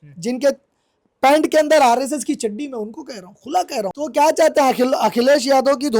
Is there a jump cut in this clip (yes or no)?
yes